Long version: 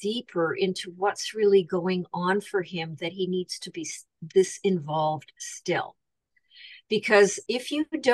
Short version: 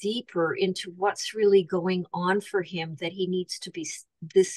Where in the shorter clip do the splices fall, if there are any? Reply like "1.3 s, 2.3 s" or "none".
none